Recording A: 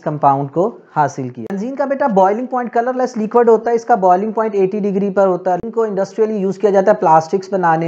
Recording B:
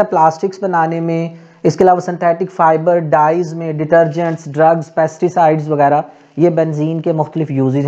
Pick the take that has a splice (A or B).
A